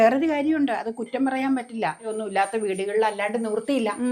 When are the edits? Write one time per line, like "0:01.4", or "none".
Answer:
0:02.1